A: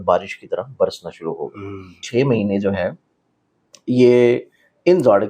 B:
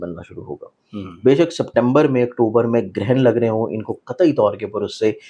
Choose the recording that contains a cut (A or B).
A